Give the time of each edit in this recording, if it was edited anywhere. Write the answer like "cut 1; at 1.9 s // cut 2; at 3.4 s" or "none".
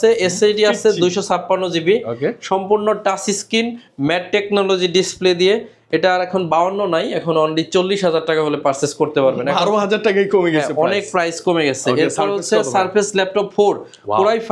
none